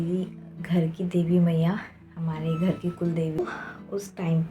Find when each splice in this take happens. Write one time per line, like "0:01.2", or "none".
0:03.4